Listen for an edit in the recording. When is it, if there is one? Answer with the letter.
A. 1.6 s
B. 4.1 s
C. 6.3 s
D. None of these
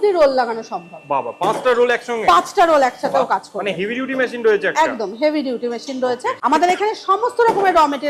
C